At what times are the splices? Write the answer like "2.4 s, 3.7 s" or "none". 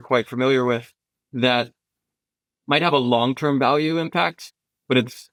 none